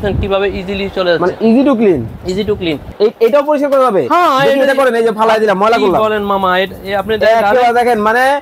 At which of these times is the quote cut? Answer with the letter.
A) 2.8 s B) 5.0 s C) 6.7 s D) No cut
A